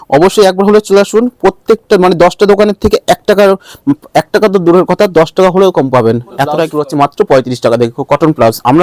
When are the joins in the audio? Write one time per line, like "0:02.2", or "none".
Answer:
0:06.7